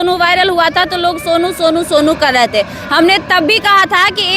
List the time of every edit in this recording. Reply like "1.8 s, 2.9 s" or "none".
none